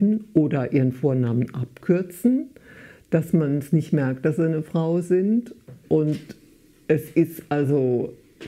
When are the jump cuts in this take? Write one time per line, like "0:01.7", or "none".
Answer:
none